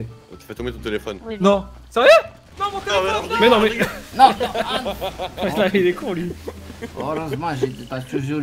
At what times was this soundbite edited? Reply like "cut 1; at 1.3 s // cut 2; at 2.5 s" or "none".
none